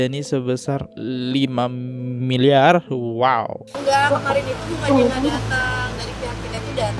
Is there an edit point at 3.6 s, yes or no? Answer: yes